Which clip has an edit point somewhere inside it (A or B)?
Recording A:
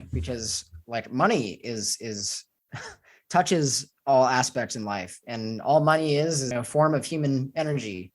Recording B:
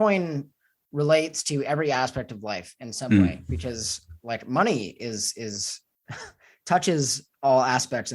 A